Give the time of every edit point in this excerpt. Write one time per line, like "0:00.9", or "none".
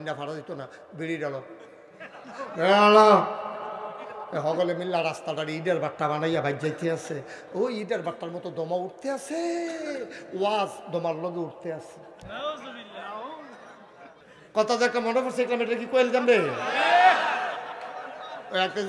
0:14.1